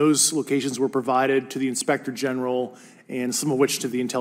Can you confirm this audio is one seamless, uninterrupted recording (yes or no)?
yes